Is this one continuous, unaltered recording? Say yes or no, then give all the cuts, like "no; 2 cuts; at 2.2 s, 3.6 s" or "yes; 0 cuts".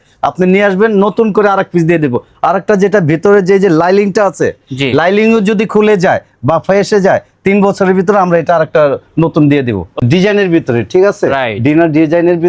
no; 1 cut; at 10.0 s